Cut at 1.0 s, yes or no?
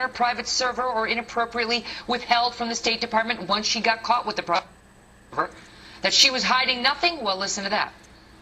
no